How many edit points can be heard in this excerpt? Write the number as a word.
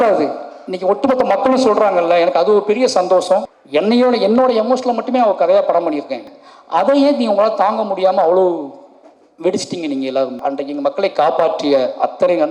three